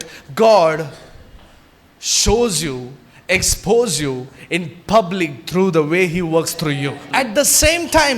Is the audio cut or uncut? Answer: cut